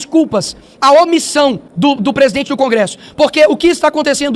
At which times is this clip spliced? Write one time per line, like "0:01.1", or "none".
0:01.7

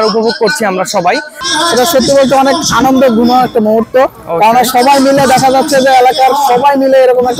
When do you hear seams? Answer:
0:01.4

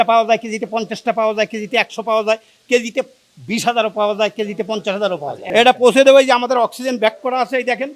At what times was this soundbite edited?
0:05.4

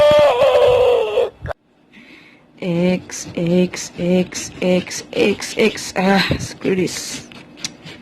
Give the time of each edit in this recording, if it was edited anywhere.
0:01.4

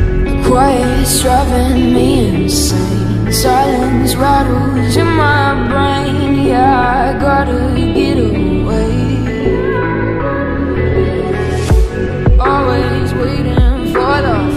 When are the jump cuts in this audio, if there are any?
none

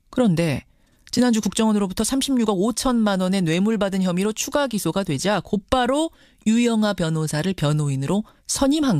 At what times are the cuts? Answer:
0:05.7

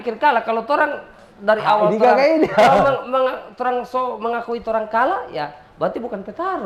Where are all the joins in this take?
none

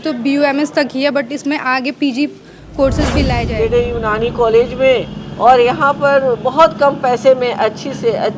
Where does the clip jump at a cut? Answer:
0:03.4

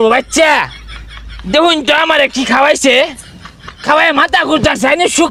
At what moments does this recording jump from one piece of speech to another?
none

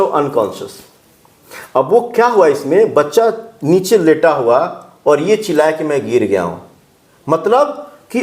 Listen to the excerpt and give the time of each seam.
none

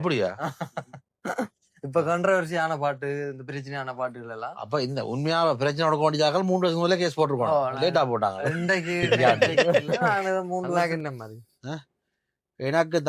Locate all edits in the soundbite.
0:10.8

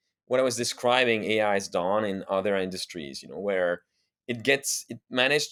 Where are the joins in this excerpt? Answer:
none

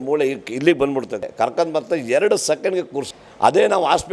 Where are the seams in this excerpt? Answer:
0:01.2
0:03.1

